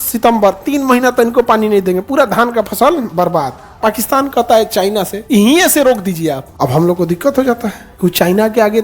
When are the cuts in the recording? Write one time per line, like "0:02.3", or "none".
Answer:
0:03.5
0:05.2
0:06.5
0:07.8